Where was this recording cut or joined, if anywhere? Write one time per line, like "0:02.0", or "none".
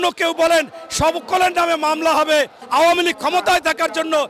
0:02.6